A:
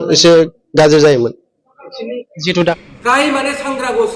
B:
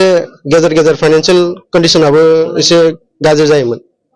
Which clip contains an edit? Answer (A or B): A